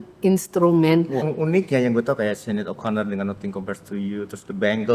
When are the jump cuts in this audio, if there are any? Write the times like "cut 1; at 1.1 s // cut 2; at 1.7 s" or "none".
cut 1; at 1.3 s